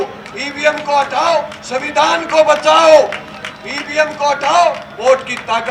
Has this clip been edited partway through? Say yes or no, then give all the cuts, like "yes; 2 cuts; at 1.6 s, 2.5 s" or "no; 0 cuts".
no; 0 cuts